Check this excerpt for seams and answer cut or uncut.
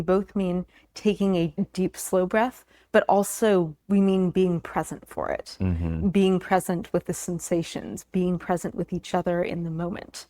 cut